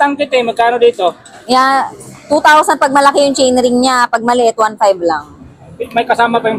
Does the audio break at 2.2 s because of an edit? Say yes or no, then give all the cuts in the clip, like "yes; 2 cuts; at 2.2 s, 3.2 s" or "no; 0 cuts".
no; 0 cuts